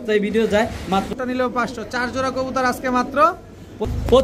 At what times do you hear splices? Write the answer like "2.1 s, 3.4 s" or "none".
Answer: 1.1 s